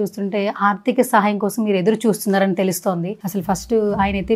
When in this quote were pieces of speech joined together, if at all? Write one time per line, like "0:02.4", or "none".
none